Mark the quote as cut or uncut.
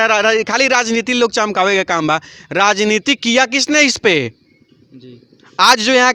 uncut